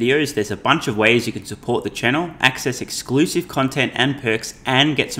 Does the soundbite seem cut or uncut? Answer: uncut